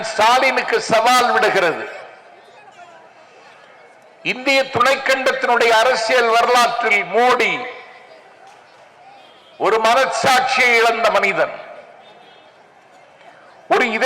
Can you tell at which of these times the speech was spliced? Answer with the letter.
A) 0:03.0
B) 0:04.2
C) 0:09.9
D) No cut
D